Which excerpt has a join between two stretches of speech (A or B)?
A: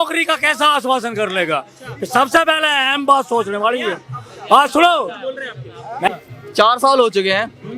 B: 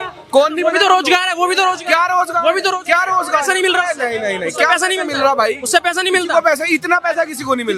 A